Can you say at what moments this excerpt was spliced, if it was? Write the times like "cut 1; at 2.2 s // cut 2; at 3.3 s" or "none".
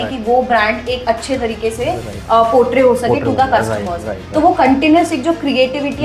none